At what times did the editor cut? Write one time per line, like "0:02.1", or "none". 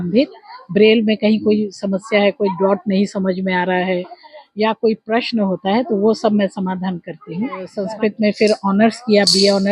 0:07.8